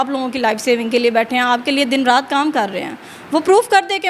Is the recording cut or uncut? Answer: uncut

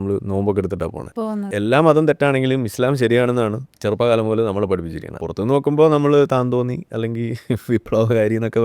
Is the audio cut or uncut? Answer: cut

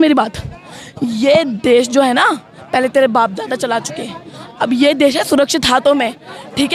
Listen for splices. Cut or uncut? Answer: uncut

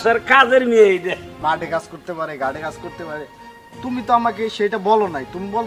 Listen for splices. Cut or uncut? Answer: cut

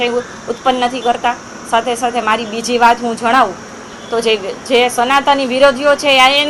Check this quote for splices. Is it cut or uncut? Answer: uncut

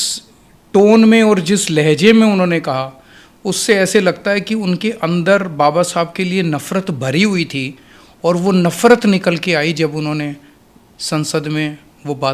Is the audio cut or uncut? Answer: uncut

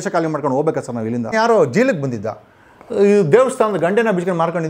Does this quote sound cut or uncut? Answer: cut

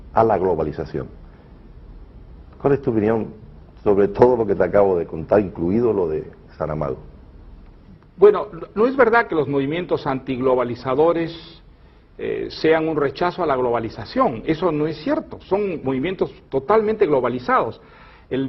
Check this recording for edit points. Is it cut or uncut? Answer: uncut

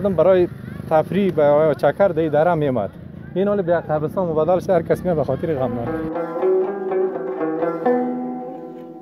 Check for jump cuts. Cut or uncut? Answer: uncut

